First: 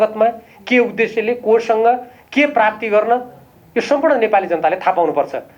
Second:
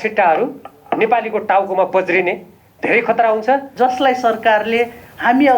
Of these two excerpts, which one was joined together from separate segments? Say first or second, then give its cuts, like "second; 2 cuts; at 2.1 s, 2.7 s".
second; 1 cut; at 3.7 s